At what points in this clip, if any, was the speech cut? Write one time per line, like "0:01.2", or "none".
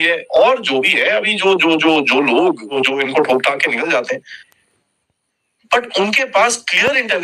0:02.8
0:04.4